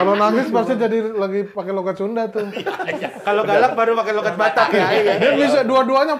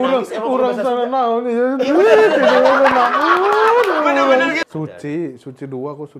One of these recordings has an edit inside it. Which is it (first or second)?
second